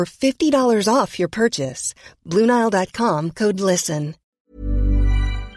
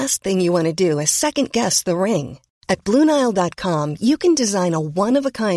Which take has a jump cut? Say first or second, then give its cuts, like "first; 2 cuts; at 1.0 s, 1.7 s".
first; 1 cut; at 4.4 s